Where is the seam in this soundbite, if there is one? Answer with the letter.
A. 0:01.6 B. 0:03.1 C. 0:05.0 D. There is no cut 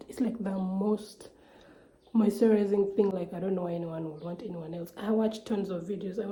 D